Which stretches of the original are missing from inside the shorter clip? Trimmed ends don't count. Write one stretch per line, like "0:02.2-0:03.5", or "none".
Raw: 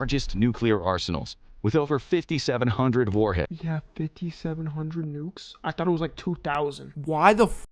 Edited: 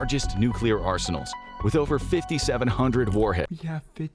none